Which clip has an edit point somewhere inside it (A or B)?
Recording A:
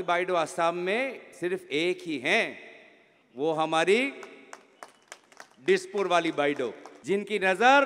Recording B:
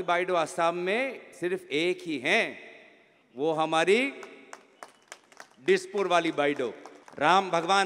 B